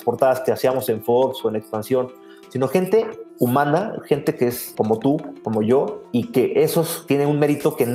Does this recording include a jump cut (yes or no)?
yes